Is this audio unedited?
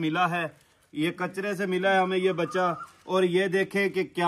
yes; 0 cuts

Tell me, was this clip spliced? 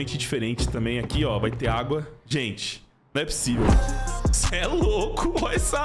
no; 0 cuts

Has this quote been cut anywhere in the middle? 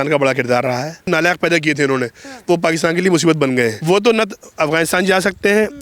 yes; 2 cuts; at 1.1 s, 3.8 s

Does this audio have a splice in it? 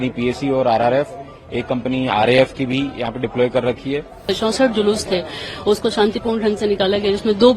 yes; 1 cut; at 4.2 s

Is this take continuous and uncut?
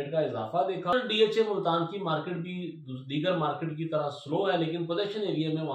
no; 1 cut; at 0.9 s

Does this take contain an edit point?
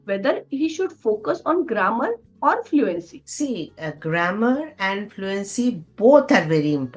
no; 0 cuts

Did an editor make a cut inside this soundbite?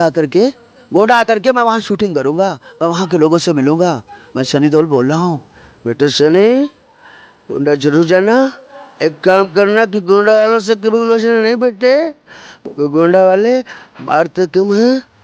no; 0 cuts

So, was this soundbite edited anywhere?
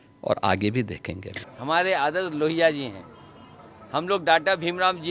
yes; 1 cut; at 1.4 s

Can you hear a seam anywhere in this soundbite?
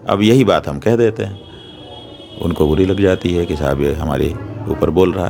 no; 0 cuts

